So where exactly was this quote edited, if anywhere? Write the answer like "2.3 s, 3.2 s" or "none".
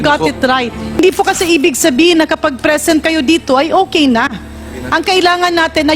1.0 s